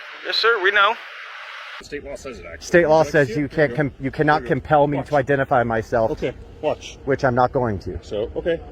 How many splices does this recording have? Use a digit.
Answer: 1